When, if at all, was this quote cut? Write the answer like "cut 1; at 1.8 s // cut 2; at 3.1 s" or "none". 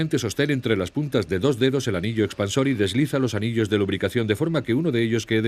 none